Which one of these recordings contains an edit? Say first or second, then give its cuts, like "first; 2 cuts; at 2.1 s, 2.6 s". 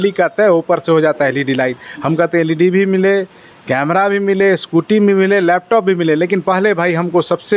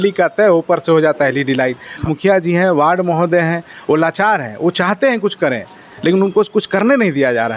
second; 1 cut; at 2.0 s